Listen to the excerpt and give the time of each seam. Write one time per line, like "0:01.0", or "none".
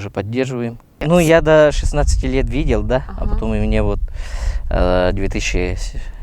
0:00.9